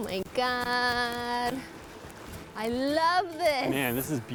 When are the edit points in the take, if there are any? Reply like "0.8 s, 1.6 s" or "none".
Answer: none